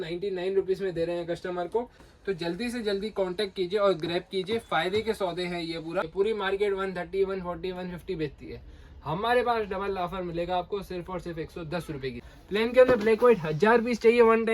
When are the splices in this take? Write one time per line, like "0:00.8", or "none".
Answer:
0:02.0
0:06.1
0:12.3

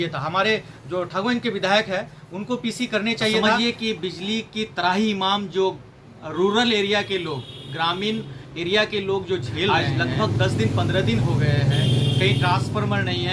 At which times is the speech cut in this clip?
0:03.5
0:09.7

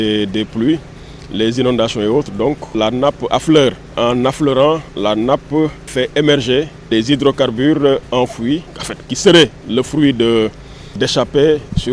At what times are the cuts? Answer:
0:02.7
0:03.9
0:05.9
0:06.9

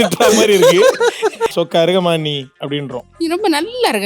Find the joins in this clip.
0:01.5

